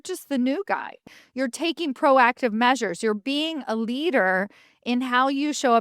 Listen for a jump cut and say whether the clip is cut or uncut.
cut